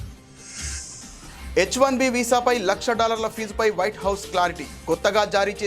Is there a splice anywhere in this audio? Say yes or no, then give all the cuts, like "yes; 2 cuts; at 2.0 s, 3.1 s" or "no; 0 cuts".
yes; 1 cut; at 1.5 s